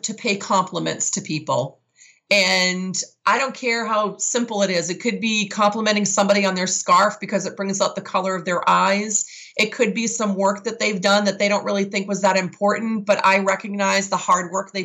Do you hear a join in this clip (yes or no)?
no